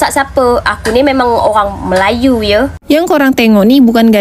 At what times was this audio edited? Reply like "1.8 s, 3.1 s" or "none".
2.8 s